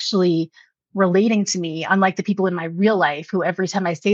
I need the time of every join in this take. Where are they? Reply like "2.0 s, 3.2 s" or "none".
none